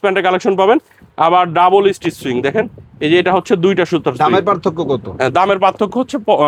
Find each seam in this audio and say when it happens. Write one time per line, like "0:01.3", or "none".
none